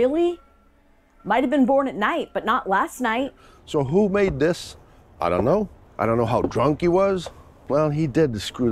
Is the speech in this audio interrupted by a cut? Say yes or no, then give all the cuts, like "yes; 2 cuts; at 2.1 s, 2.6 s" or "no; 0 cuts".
yes; 3 cuts; at 3.4 s, 5.8 s, 7.6 s